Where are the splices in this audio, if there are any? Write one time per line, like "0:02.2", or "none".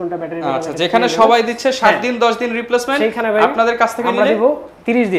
none